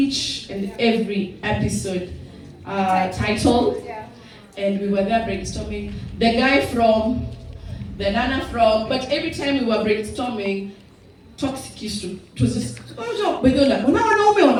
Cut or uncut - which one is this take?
uncut